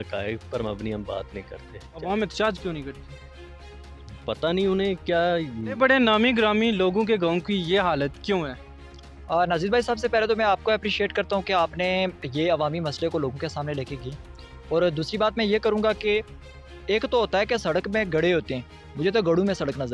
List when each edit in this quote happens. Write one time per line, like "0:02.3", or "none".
0:02.0
0:05.6